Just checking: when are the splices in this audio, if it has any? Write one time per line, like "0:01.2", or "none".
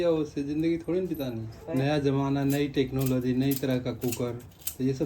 0:01.6